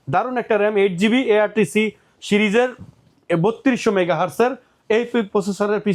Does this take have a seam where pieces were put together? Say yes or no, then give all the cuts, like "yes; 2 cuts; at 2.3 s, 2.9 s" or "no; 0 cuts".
no; 0 cuts